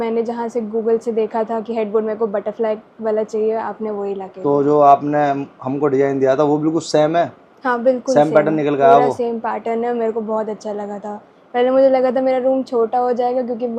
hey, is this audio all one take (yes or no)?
yes